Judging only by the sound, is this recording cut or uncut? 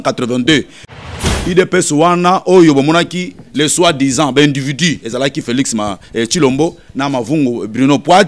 cut